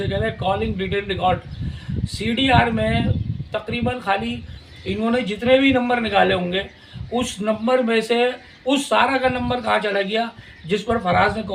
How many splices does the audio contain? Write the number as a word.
zero